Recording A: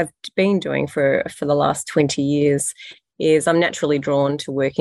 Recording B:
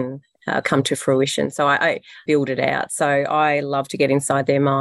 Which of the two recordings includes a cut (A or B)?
B